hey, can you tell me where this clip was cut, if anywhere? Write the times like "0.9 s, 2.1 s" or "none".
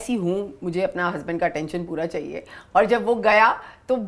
none